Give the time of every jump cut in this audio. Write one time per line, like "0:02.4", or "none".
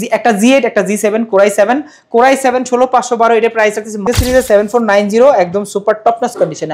0:04.0